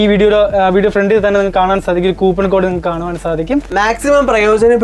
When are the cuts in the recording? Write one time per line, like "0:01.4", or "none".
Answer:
0:03.9

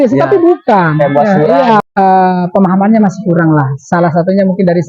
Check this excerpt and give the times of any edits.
0:01.8

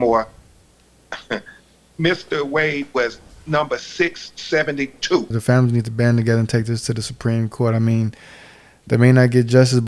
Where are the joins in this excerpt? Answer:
0:05.4

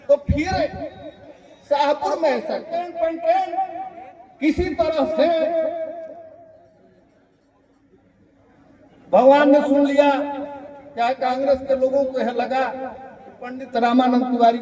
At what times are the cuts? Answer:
0:02.8

